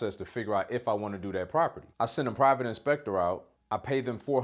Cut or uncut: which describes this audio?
cut